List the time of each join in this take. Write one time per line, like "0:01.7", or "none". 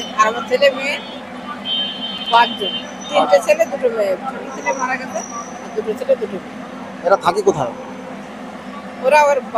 none